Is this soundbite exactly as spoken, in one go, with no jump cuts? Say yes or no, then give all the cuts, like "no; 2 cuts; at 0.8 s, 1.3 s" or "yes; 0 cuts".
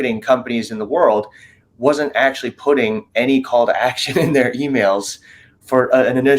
yes; 0 cuts